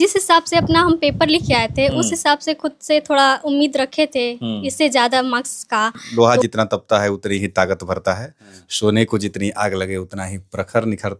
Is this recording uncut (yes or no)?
no